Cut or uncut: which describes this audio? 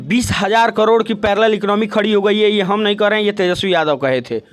uncut